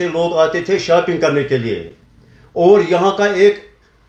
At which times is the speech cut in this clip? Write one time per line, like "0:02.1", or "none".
none

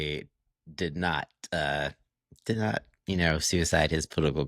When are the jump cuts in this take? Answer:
none

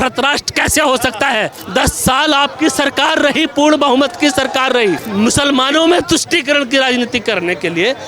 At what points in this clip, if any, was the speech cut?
0:01.6
0:05.0

